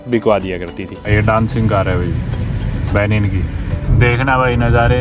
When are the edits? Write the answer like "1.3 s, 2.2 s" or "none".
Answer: 1.1 s, 3.9 s